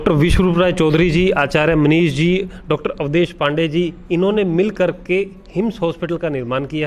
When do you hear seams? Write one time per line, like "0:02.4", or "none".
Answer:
none